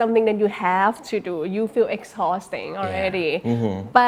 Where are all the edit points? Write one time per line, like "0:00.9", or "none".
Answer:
none